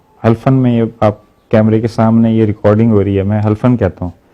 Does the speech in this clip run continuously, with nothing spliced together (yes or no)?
yes